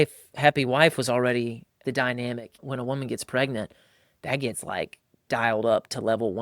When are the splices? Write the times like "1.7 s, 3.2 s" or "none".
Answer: 1.8 s, 2.6 s